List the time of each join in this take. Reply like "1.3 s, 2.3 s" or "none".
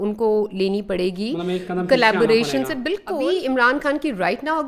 3.2 s